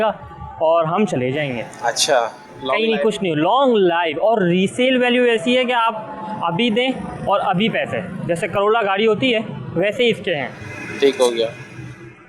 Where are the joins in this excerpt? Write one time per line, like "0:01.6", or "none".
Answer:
none